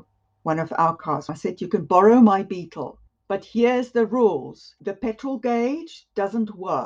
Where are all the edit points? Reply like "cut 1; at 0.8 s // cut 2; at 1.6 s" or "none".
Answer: cut 1; at 1.3 s